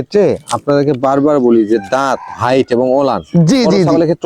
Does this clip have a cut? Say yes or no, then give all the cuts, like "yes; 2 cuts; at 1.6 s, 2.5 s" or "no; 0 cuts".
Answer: no; 0 cuts